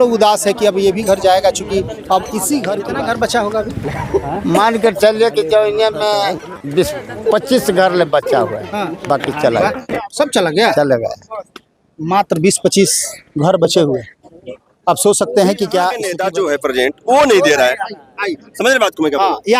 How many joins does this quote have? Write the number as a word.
two